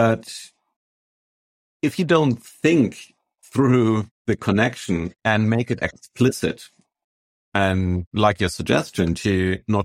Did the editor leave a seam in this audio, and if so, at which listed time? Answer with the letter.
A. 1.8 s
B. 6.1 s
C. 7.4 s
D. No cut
C